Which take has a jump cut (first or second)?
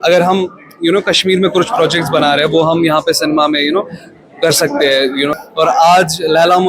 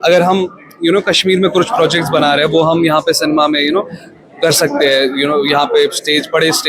first